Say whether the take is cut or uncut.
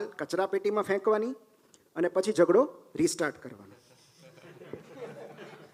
uncut